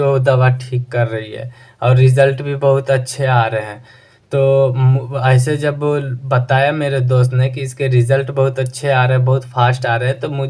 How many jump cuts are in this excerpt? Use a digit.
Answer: 0